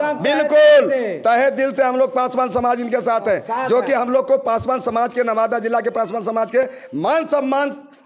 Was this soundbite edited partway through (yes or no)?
no